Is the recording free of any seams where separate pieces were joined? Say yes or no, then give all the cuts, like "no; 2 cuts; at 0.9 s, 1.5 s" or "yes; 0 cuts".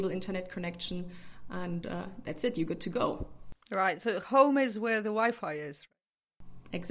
yes; 0 cuts